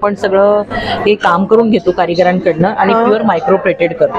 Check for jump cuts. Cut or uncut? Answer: uncut